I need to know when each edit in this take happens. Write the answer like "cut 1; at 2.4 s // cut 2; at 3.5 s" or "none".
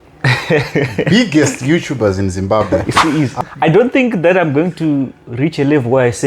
cut 1; at 2.7 s